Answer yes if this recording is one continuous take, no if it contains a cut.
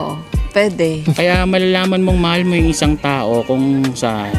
no